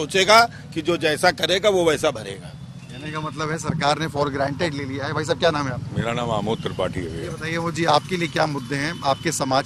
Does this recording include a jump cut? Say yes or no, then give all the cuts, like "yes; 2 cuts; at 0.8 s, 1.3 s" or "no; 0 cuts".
no; 0 cuts